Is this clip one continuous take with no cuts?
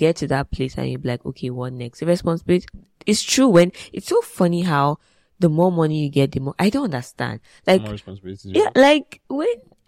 yes; 0 cuts

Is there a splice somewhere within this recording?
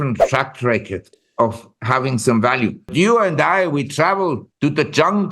yes; 2 cuts; at 2.9 s, 4.5 s

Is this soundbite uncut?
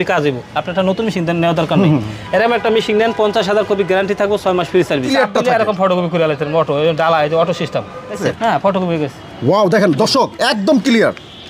no; 2 cuts; at 5.1 s, 8.3 s

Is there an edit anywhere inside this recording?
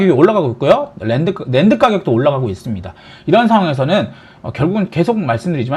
no; 0 cuts

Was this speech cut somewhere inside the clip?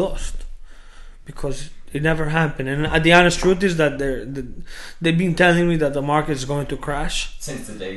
no; 0 cuts

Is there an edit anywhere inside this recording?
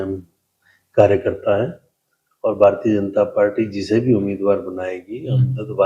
no; 0 cuts

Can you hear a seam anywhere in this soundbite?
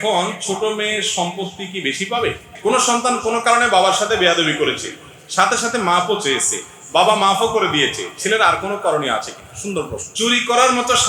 yes; 2 cuts; at 2.5 s, 10.0 s

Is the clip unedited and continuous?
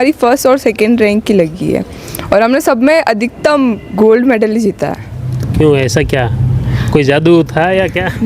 yes; 0 cuts

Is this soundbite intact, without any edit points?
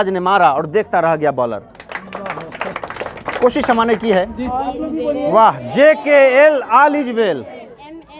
no; 1 cut; at 4.5 s

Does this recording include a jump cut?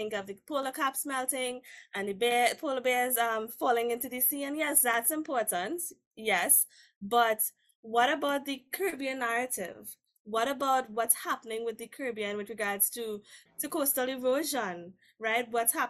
yes; 1 cut; at 13.4 s

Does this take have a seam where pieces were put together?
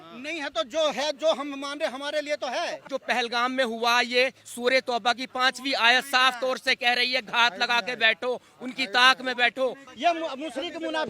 yes; 2 cuts; at 2.8 s, 9.9 s

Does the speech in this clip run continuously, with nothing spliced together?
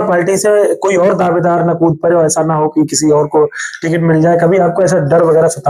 yes; 0 cuts

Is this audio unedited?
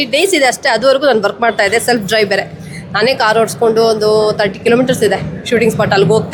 yes; 0 cuts

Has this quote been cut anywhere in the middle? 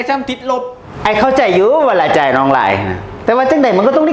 no; 0 cuts

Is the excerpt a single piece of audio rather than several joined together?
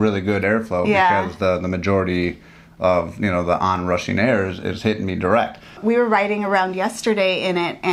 no; 1 cut; at 5.7 s

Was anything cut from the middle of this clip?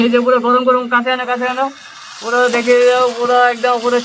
no; 0 cuts

